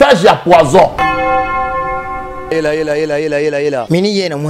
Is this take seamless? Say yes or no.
no